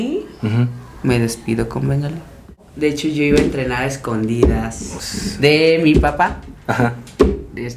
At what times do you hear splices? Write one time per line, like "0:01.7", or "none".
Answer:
0:02.6